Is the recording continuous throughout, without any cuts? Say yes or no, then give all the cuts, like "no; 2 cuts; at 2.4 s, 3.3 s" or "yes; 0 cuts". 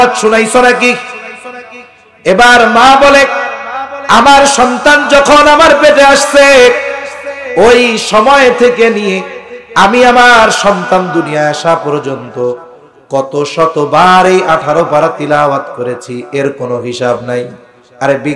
yes; 0 cuts